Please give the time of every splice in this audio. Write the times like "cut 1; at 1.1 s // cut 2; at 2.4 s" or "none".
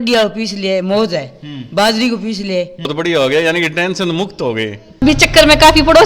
cut 1; at 2.9 s // cut 2; at 5.0 s